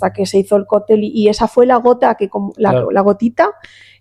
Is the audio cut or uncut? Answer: uncut